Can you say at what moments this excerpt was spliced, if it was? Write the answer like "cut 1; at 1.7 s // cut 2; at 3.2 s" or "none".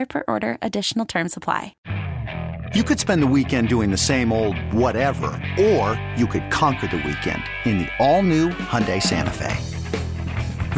cut 1; at 1.7 s

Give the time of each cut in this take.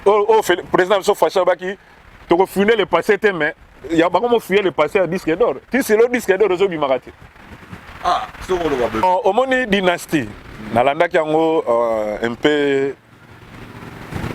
cut 1; at 9.0 s

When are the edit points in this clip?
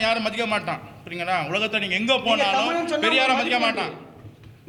none

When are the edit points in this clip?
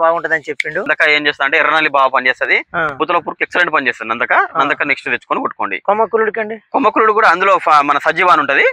cut 1; at 0.9 s // cut 2; at 2.9 s

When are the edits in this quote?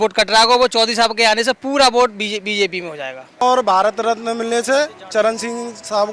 cut 1; at 3.4 s

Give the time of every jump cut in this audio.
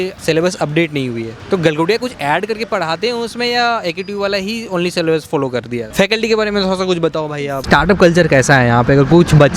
cut 1; at 5.9 s // cut 2; at 7.6 s

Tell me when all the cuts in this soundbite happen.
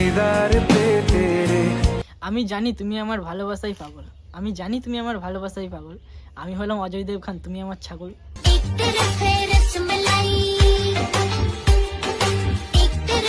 cut 1; at 2.1 s

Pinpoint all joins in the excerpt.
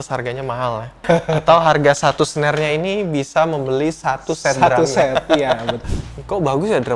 cut 1; at 0.9 s // cut 2; at 5.8 s

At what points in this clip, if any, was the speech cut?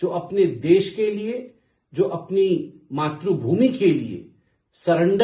none

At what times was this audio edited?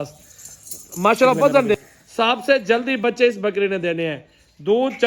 cut 1; at 1.8 s

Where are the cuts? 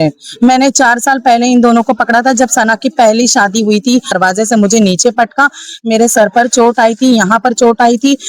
cut 1; at 4.2 s

